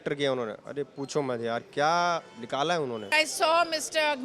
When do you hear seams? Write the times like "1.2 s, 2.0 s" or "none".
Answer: 3.1 s